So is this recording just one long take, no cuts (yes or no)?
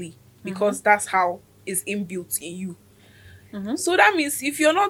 yes